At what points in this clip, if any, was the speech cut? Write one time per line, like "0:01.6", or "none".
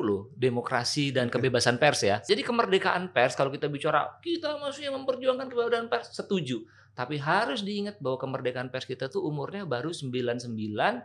0:02.2